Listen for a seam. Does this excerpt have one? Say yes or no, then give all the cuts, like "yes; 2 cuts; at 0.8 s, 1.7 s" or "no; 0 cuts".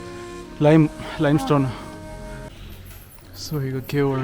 yes; 1 cut; at 2.4 s